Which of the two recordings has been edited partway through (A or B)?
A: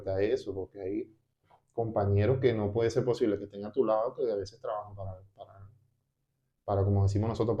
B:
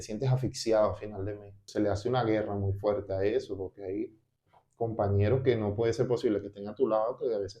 B